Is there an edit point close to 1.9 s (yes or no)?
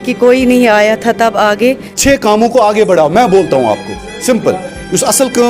yes